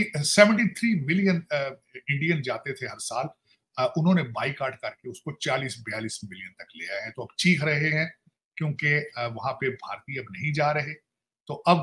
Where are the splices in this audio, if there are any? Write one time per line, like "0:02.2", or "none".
none